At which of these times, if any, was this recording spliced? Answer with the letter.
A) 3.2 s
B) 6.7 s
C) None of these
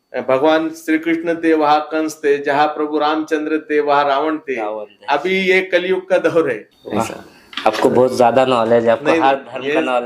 B